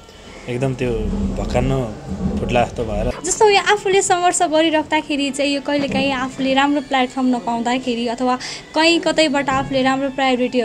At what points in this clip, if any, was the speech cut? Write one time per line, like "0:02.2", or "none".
0:03.1